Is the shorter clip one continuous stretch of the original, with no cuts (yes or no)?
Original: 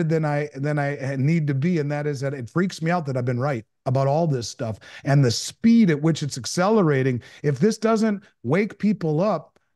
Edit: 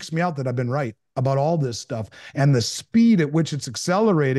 yes